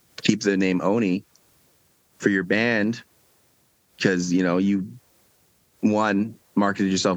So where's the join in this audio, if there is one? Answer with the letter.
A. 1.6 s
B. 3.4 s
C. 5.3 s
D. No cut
D